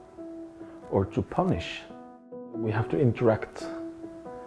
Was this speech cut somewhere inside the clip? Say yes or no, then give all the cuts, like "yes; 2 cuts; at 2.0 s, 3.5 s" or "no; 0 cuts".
yes; 1 cut; at 2.3 s